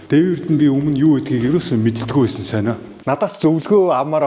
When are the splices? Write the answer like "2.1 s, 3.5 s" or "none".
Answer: 2.9 s